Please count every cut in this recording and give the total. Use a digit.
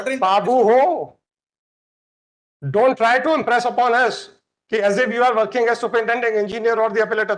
0